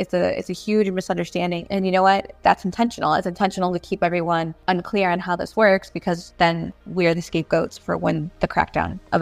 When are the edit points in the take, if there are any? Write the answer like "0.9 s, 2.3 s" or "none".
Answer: 1.6 s, 2.4 s, 4.5 s, 6.3 s, 7.8 s